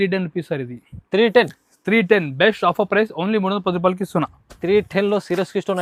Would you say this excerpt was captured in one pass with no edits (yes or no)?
yes